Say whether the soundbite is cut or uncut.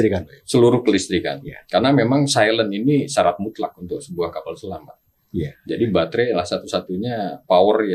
uncut